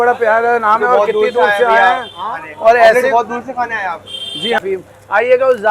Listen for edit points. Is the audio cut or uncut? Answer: cut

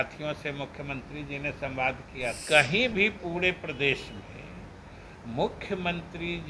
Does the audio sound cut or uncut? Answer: cut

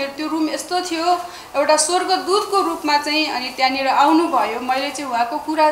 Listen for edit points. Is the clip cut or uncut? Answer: uncut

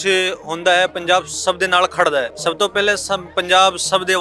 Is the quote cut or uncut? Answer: cut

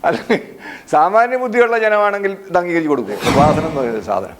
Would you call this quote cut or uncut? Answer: cut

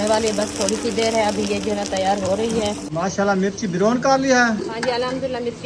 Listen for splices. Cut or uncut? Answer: cut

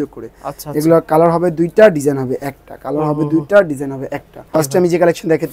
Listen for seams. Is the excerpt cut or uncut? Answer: cut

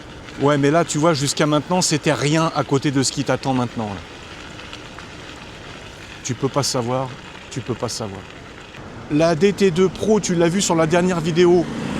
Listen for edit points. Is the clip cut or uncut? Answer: cut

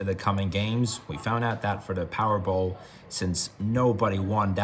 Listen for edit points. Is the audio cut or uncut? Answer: uncut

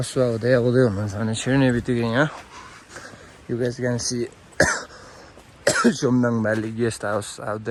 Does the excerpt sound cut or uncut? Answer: uncut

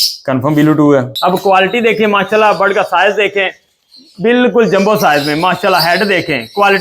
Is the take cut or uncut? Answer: cut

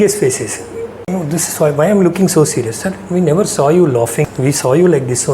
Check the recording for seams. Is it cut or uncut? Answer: cut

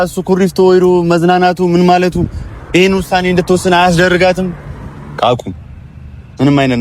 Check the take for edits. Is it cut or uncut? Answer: cut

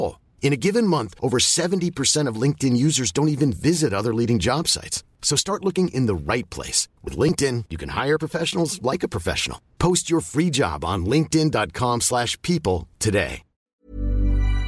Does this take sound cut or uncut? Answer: cut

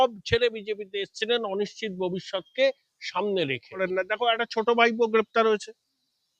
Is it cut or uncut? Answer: cut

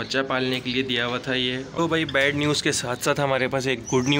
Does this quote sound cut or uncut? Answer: cut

